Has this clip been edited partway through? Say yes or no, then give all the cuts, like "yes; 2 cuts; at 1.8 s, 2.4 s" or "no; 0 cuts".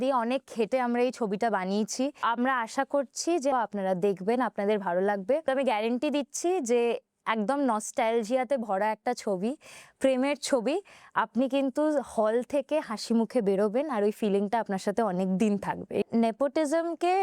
yes; 4 cuts; at 2.2 s, 3.5 s, 5.4 s, 16.0 s